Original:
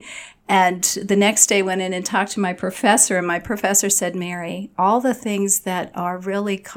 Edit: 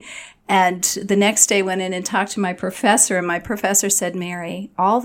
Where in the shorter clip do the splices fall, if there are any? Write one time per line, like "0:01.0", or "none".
none